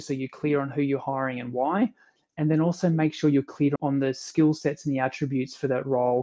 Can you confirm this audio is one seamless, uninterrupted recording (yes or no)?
no